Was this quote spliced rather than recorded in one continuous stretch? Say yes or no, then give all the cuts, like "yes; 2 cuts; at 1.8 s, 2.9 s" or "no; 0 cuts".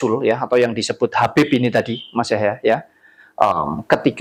no; 0 cuts